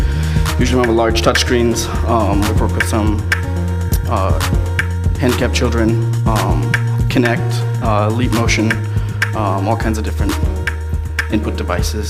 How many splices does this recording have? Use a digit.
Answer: 1